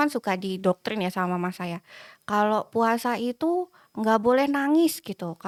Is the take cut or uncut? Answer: uncut